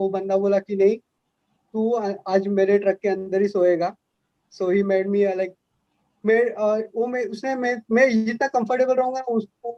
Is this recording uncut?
yes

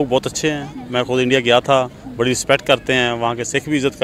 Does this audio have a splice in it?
no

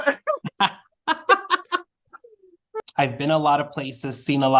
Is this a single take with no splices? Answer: no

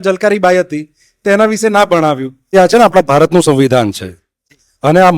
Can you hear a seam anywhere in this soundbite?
yes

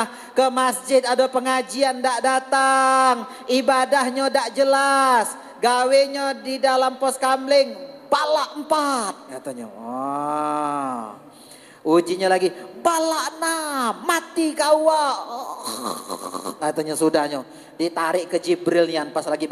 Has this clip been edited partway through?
no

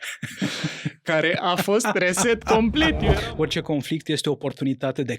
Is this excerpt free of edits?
no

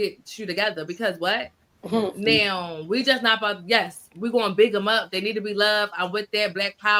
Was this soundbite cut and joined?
no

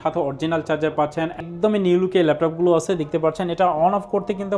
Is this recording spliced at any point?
yes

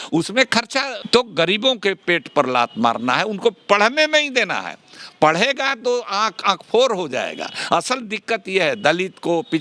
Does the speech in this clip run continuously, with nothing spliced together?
no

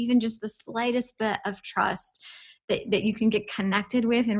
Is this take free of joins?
yes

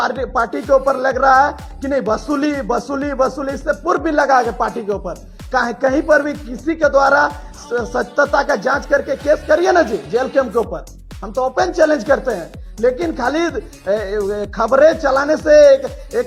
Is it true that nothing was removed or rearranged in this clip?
yes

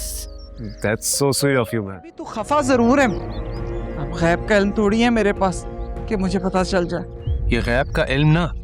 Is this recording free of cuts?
no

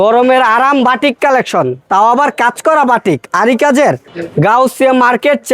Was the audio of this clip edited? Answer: yes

